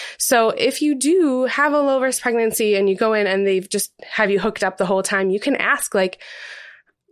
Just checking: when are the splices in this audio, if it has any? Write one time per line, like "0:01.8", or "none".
none